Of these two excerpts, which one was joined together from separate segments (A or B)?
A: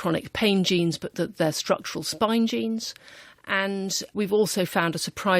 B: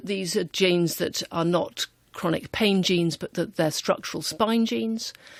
A